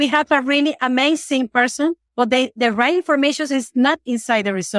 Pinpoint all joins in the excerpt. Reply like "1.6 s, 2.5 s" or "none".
2.0 s